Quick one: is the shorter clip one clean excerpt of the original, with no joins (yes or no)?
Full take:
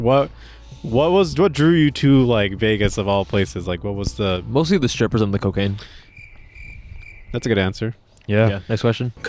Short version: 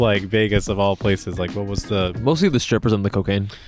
yes